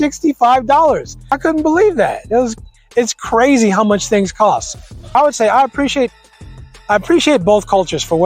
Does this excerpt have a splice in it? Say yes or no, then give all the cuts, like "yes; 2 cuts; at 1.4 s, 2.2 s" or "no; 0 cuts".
yes; 2 cuts; at 1.2 s, 5.1 s